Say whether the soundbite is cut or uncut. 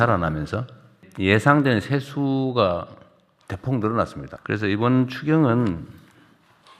cut